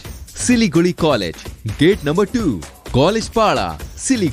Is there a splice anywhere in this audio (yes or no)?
no